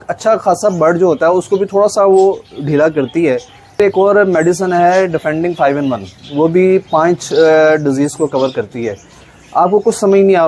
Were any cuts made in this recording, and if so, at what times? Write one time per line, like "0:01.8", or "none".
0:03.8